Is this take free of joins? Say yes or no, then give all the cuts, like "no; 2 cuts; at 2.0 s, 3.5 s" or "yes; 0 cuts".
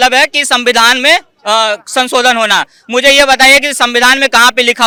yes; 0 cuts